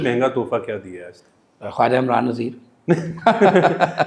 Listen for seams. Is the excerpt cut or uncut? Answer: uncut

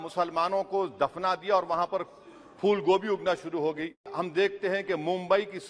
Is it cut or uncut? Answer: cut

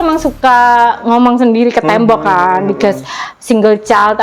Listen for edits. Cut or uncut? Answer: uncut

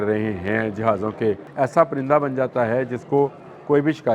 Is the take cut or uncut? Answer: cut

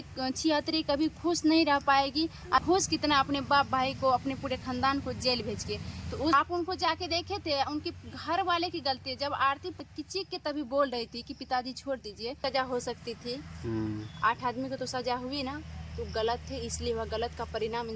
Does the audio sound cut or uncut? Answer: cut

